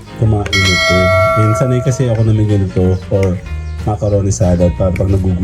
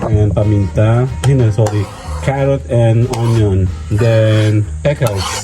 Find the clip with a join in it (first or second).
second